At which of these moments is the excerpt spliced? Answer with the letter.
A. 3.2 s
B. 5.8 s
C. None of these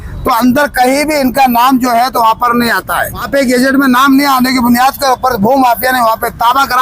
A